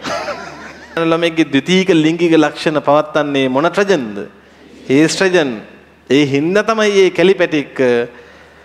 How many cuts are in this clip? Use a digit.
1